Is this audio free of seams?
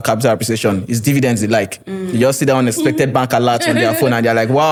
yes; 0 cuts

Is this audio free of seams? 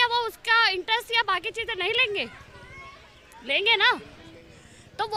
yes; 0 cuts

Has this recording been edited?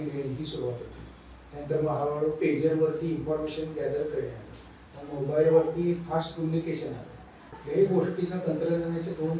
yes; 1 cut; at 7.5 s

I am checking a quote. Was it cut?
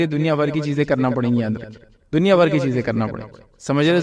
no; 0 cuts

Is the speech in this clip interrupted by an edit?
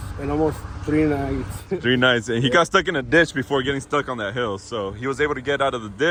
no; 0 cuts

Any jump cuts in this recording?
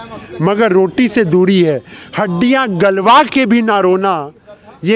no; 0 cuts

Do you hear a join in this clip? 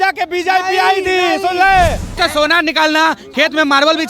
yes; 1 cut; at 2.5 s

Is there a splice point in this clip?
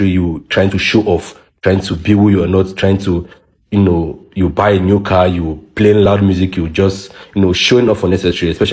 no; 0 cuts

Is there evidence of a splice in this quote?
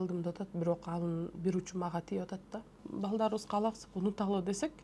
yes; 1 cut; at 2.8 s

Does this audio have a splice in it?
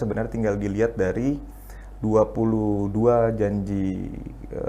no; 0 cuts

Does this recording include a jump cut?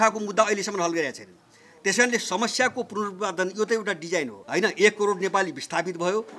yes; 1 cut; at 4.4 s

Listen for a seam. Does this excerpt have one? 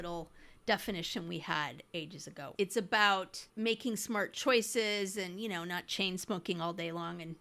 yes; 2 cuts; at 2.4 s, 3.4 s

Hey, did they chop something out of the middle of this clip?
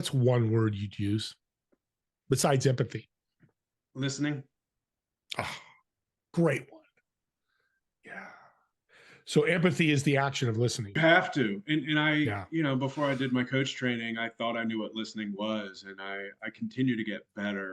yes; 1 cut; at 10.9 s

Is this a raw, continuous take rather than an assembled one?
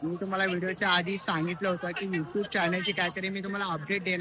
yes; 0 cuts

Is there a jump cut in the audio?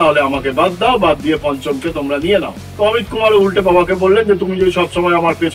yes; 1 cut; at 2.6 s

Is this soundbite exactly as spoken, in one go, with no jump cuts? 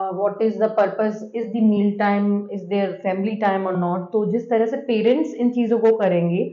yes; 0 cuts

